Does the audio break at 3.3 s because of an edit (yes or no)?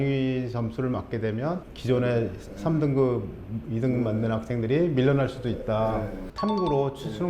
no